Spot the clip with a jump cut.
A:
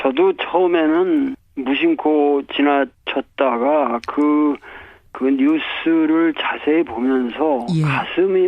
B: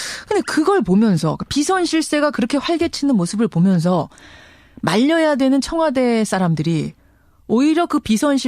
B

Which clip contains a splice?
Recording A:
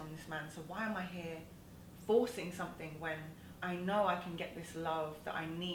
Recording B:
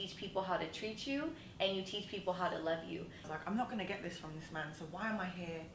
B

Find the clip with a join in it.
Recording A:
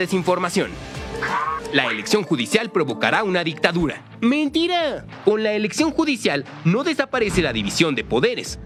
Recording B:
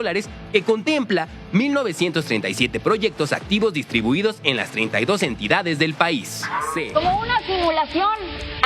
B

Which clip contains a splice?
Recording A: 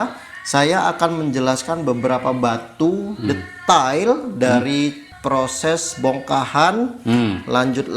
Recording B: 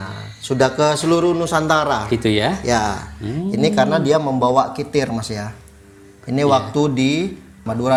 A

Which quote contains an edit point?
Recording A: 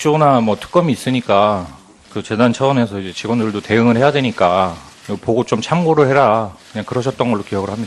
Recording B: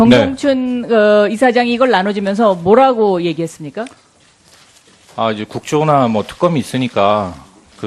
A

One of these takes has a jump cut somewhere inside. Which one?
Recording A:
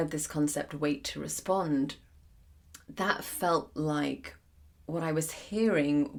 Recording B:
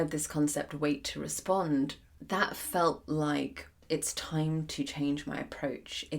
B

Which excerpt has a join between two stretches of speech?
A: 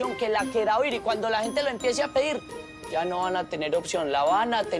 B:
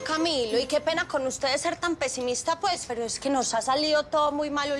A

